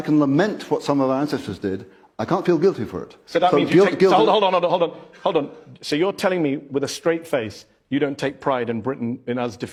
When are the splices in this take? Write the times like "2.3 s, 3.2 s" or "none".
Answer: none